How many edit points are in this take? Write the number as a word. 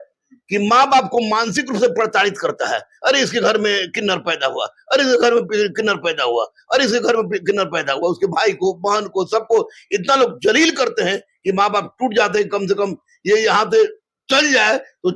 zero